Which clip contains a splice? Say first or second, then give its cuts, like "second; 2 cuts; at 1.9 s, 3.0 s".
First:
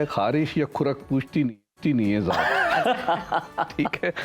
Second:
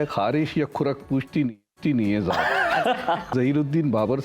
second; 1 cut; at 3.3 s